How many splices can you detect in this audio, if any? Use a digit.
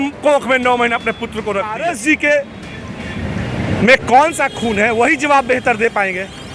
1